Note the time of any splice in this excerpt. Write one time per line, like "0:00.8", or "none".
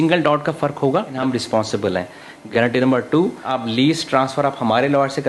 0:01.2
0:02.4
0:03.5